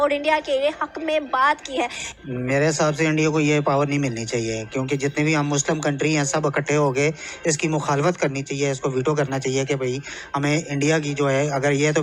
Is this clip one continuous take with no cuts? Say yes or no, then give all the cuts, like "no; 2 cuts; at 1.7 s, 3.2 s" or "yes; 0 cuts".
yes; 0 cuts